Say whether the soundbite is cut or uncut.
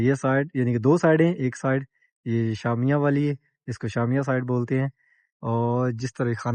uncut